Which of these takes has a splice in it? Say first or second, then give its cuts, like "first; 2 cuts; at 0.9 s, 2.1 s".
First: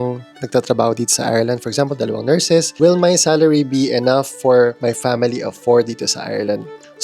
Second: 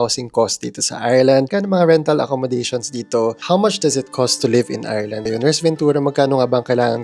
first; 1 cut; at 4.8 s